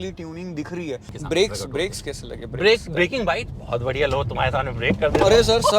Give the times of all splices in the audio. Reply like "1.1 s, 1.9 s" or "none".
1.1 s

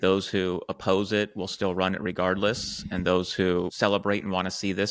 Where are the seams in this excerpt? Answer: 3.7 s

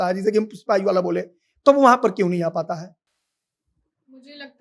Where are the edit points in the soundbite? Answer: none

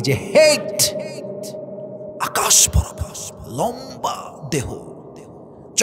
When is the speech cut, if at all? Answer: none

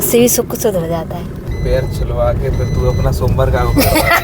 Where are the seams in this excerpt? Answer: 1.5 s

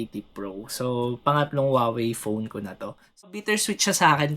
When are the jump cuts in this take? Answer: 3.3 s

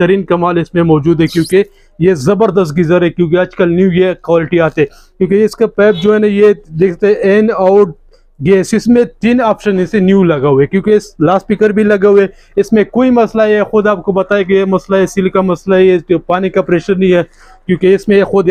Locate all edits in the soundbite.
none

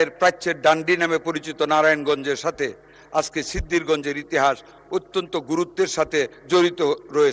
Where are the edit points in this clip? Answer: 6.4 s

